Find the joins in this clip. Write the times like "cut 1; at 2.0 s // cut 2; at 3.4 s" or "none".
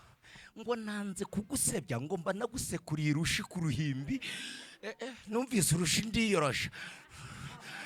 none